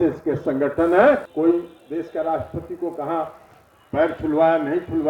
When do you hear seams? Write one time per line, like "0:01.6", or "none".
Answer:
0:01.3